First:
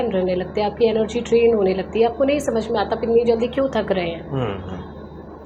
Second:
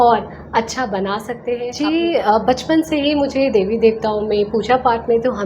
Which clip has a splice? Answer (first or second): second